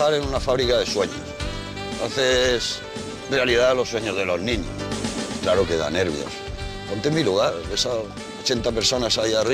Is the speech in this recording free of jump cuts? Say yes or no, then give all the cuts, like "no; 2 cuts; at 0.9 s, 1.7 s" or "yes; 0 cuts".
no; 1 cut; at 1.7 s